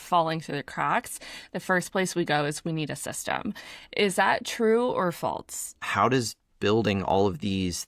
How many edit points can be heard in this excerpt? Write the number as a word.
one